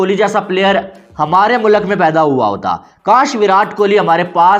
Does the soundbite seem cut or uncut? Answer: uncut